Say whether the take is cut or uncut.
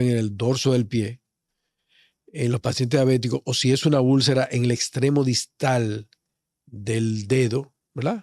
uncut